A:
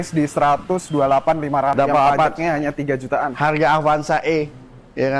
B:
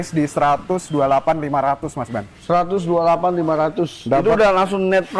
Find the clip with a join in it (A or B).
A